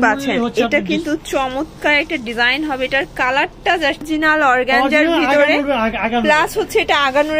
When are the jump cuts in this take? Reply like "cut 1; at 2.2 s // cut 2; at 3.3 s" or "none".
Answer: cut 1; at 4.0 s